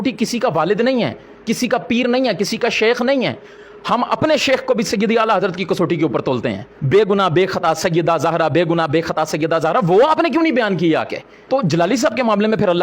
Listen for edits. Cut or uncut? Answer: cut